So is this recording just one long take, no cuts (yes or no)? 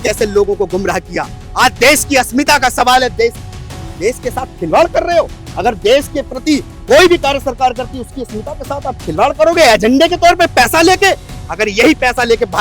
yes